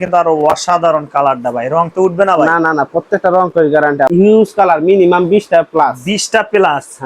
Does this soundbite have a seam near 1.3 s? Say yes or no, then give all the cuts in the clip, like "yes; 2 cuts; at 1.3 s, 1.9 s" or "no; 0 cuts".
no; 1 cut; at 4.1 s